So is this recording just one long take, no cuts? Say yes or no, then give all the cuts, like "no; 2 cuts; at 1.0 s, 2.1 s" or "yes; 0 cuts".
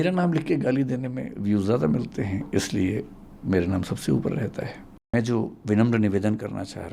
no; 1 cut; at 5.1 s